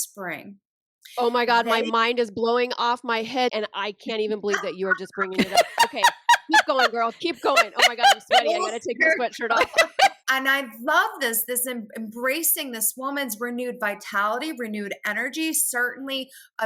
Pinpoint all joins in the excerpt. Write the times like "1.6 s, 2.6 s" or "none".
3.5 s, 10.2 s